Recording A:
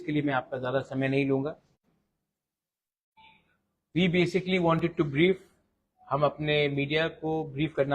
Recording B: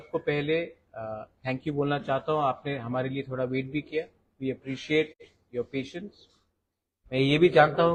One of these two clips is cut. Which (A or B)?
A